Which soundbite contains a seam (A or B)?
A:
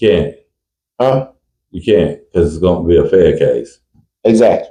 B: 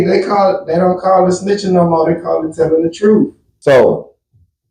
B